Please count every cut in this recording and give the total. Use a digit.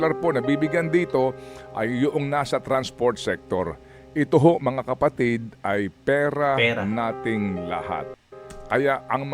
1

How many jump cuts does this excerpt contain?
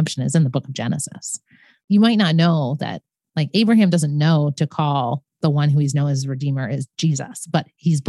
1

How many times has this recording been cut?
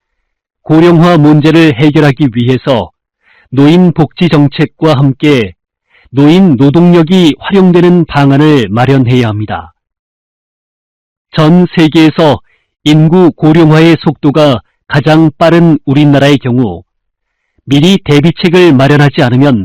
0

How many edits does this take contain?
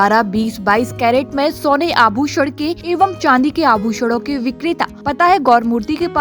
2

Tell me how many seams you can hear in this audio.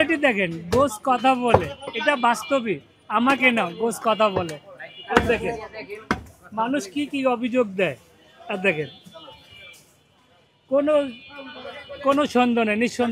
0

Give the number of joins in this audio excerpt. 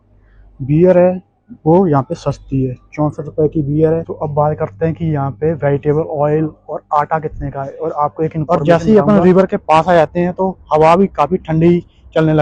2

